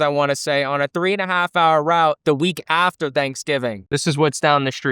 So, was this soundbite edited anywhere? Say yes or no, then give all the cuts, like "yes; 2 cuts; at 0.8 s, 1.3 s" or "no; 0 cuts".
yes; 1 cut; at 3.9 s